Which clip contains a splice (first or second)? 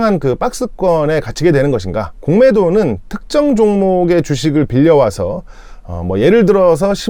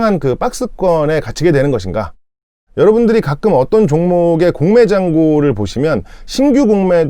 second